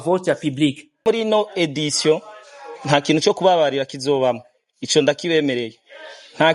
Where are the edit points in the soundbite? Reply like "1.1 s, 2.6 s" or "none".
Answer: 1.0 s